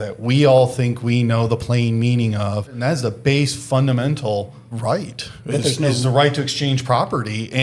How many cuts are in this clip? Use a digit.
2